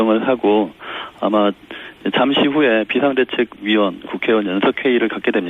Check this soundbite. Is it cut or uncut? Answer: cut